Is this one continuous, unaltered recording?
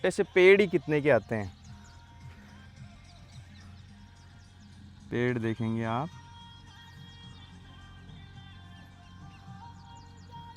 yes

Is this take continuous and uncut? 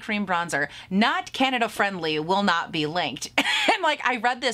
yes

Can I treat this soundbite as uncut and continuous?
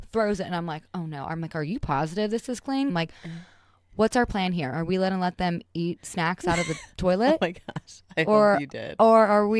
no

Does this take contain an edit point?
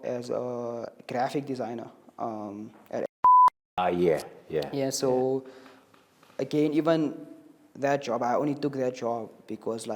no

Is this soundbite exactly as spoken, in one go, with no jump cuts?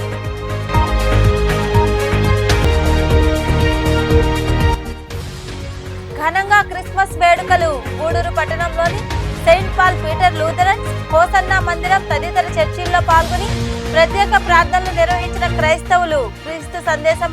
no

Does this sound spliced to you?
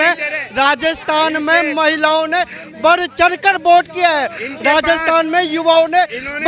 no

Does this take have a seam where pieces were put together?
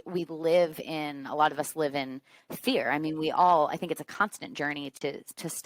no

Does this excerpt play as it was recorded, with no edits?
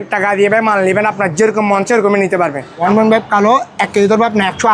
no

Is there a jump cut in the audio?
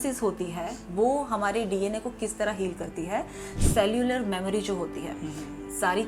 no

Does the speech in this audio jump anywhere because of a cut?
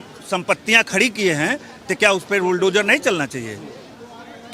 no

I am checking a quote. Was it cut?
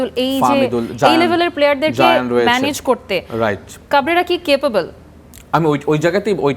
no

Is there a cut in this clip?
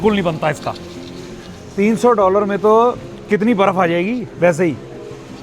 no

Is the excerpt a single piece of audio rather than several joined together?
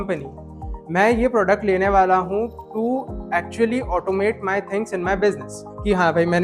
no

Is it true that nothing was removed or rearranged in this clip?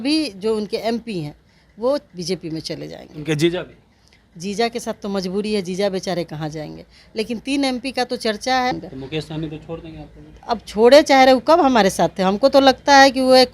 no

